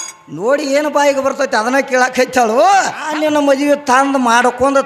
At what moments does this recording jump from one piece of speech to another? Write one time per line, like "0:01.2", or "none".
0:03.1